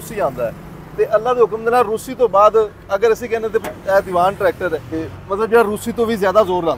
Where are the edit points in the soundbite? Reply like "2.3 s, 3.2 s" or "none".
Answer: 5.1 s